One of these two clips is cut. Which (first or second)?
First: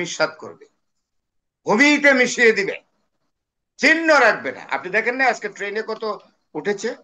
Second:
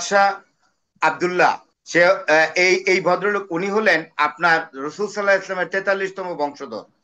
second